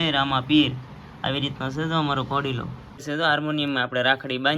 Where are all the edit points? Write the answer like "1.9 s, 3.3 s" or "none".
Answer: 3.0 s